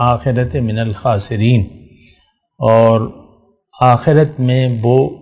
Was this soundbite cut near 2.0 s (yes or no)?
no